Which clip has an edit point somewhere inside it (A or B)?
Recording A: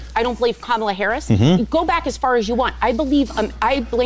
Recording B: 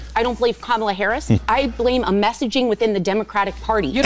B